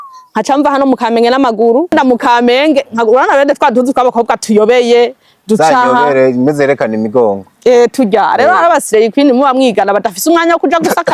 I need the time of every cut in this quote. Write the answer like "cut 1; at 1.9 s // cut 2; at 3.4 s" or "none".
cut 1; at 1.9 s